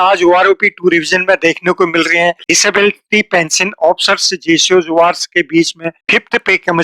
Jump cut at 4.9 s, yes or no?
no